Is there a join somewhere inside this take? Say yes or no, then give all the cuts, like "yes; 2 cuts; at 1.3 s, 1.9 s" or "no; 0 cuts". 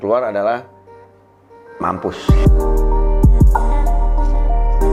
no; 0 cuts